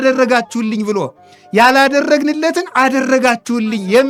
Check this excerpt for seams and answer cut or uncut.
uncut